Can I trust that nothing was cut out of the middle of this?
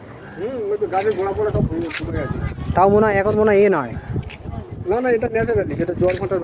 yes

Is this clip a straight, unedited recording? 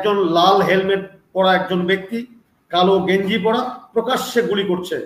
yes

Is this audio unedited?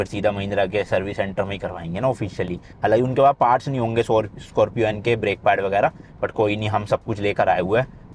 yes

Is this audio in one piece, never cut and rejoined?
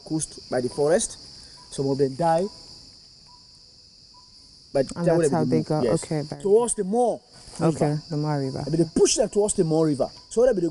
yes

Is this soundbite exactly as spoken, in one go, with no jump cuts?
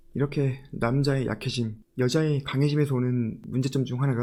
yes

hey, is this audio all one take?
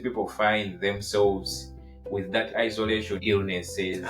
no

